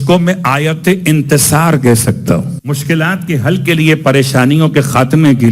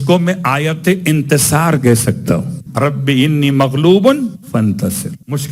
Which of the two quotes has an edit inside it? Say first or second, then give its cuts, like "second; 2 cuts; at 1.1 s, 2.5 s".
first; 1 cut; at 2.6 s